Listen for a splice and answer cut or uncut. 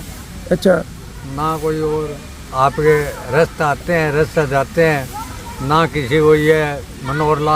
uncut